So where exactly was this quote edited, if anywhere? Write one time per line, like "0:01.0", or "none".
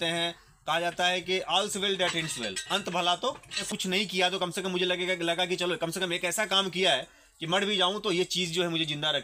0:03.6